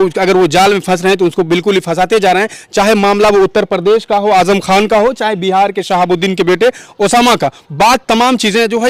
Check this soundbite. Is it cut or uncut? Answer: uncut